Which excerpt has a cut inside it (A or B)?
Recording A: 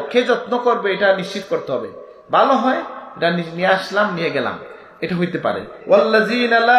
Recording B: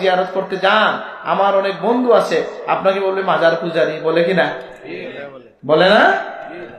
A